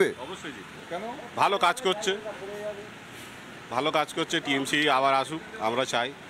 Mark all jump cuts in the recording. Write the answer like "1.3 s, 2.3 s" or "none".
none